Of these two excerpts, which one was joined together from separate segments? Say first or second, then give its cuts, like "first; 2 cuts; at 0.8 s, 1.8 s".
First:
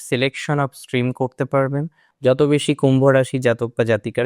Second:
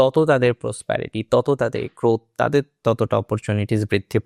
first; 1 cut; at 2.0 s